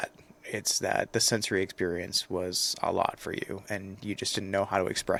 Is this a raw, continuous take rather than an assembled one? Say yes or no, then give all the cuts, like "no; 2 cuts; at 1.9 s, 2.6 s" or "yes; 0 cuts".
yes; 0 cuts